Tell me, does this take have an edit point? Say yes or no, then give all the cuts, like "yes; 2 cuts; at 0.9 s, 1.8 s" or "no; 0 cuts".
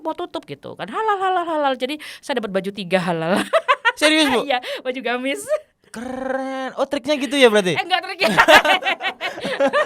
no; 0 cuts